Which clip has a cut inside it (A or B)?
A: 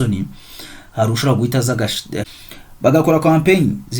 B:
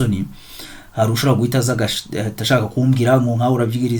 A